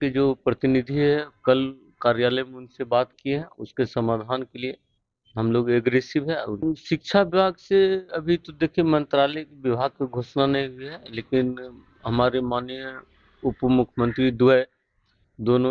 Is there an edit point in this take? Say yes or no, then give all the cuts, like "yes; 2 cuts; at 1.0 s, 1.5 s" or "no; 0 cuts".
yes; 1 cut; at 6.6 s